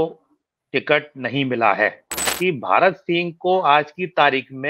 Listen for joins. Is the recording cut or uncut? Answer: cut